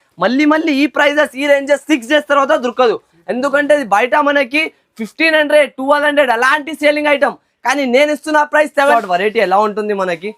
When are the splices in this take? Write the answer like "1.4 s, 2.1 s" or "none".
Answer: 8.9 s